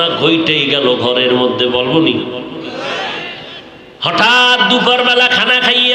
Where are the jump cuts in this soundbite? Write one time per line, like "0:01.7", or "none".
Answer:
0:03.6